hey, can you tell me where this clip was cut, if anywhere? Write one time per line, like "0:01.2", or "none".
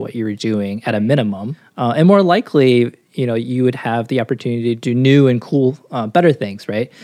0:01.5
0:04.8